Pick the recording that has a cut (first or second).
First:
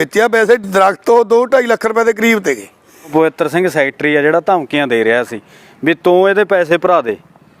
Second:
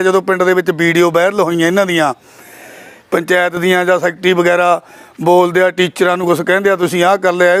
first